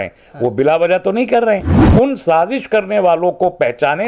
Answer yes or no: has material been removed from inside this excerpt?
yes